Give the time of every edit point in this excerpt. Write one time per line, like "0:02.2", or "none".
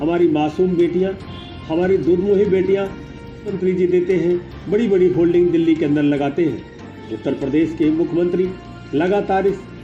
0:03.5